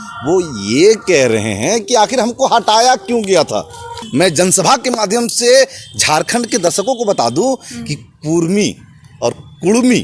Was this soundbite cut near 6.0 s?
no; 1 cut; at 3.9 s

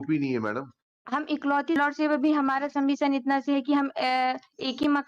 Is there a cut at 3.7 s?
no; 1 cut; at 1.8 s

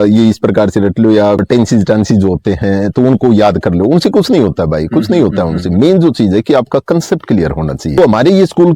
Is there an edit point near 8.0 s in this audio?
yes; 2 cuts; at 1.4 s, 8.0 s

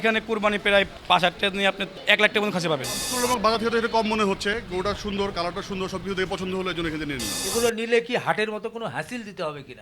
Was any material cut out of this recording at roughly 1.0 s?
yes; 4 cuts; at 1.0 s, 1.9 s, 3.1 s, 7.3 s

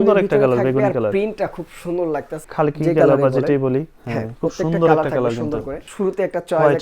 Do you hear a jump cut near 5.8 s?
yes; 2 cuts; at 2.4 s, 5.8 s

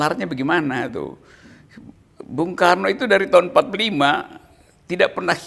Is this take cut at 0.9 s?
no; 0 cuts

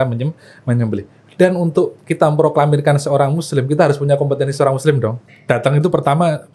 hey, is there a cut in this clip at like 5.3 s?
yes; 1 cut; at 5.3 s

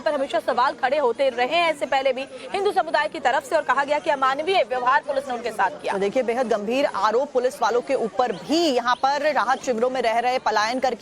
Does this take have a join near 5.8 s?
yes; 1 cut; at 5.8 s

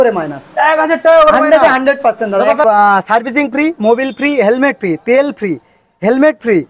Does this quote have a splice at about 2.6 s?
yes; 1 cut; at 2.6 s

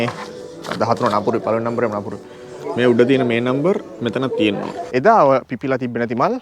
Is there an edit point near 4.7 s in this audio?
yes; 1 cut; at 4.7 s

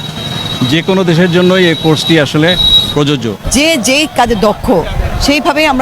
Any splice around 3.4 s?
yes; 1 cut; at 3.4 s

